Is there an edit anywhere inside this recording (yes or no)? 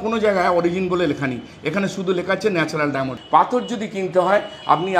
yes